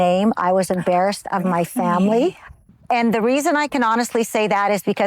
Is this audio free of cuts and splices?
no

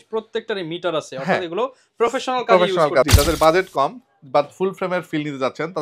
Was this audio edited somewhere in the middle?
yes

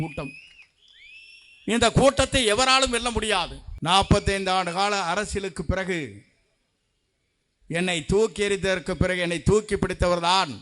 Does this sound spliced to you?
yes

